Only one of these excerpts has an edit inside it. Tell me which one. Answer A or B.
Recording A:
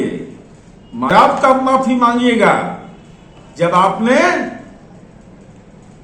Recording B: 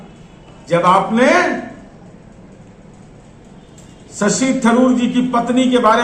A